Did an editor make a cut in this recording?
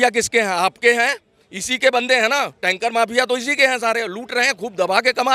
no; 0 cuts

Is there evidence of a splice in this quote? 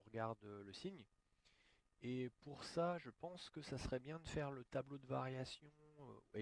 no; 0 cuts

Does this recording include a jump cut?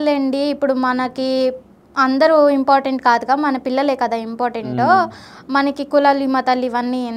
no; 0 cuts

